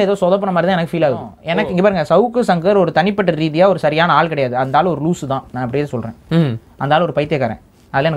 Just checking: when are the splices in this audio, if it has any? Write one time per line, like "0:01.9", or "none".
0:01.4